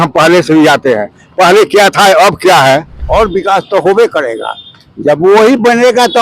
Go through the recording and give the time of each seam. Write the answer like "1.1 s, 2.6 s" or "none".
3.0 s